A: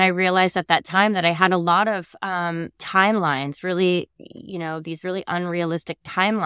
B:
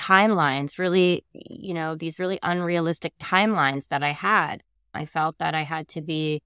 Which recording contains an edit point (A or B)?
B